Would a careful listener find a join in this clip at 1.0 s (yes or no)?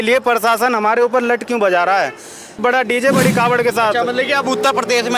no